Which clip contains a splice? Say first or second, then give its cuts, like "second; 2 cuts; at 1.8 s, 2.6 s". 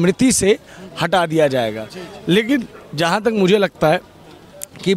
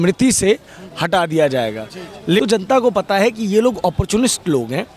second; 1 cut; at 2.4 s